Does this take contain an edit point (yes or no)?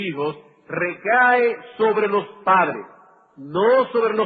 yes